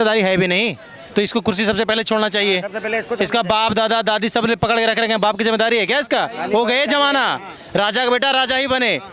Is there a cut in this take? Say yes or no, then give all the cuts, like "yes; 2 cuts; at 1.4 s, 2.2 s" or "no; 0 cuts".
no; 0 cuts